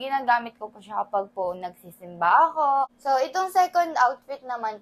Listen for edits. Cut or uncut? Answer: cut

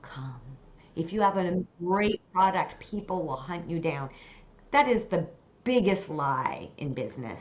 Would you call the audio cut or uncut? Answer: cut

